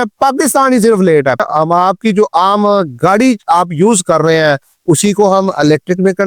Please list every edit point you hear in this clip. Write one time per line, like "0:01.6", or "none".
0:01.4